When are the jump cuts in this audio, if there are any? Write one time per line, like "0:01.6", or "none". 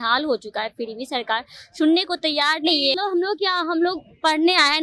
0:03.0